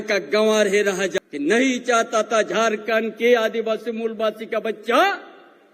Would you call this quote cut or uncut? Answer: cut